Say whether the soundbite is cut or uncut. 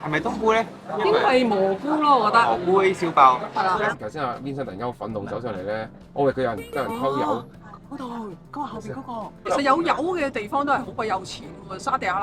cut